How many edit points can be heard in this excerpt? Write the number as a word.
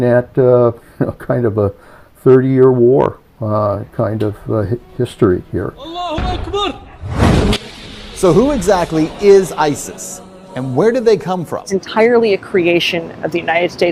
zero